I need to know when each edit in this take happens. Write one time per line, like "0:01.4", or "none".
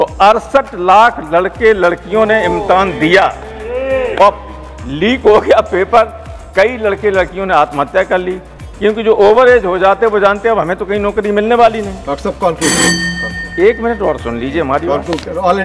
none